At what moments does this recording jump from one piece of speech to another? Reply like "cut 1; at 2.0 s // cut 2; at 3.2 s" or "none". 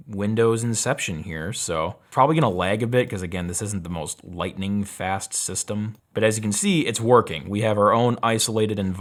none